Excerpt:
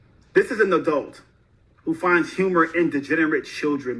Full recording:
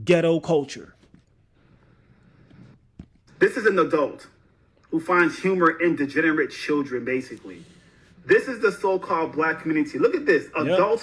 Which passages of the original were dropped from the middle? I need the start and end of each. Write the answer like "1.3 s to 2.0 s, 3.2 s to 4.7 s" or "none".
none